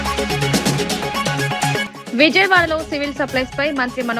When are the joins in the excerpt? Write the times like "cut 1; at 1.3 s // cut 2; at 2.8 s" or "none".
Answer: cut 1; at 1.9 s